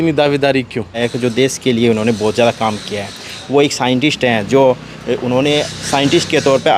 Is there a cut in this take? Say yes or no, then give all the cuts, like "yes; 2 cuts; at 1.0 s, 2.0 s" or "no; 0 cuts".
yes; 1 cut; at 1.0 s